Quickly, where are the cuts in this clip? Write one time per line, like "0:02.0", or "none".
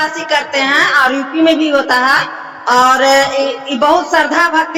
none